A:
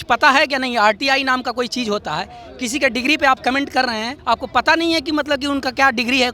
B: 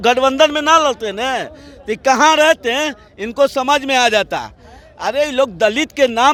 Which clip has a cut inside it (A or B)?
A